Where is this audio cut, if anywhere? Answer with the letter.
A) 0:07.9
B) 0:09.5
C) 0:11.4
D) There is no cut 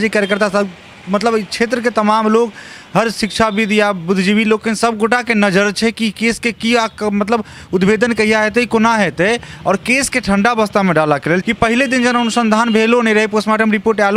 C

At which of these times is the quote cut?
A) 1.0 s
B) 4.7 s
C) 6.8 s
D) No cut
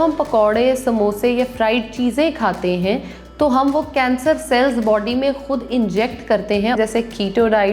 C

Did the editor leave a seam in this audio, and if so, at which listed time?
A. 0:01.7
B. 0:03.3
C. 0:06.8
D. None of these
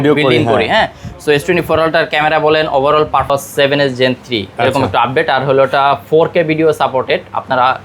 B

